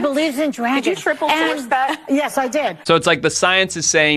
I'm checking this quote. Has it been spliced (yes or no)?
yes